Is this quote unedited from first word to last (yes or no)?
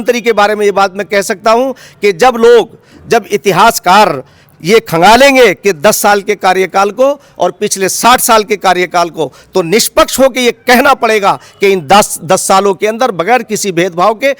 yes